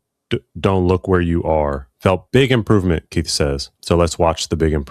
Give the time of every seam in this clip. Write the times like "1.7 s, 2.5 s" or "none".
1.9 s, 3.7 s

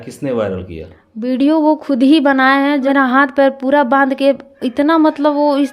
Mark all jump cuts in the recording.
2.8 s

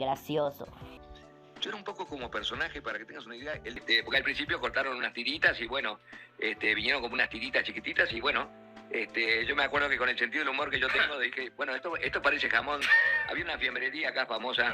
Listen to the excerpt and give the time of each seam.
1.1 s, 3.8 s

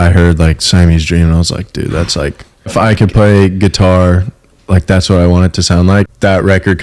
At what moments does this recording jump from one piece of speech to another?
2.7 s, 6.1 s

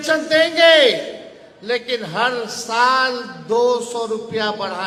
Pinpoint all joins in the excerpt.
none

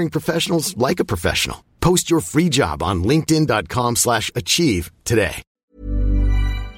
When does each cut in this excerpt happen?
5.5 s

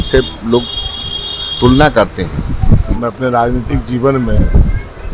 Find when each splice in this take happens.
3.0 s

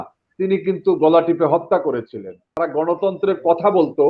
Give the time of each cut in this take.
2.6 s

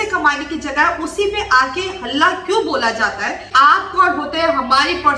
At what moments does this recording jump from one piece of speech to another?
3.5 s

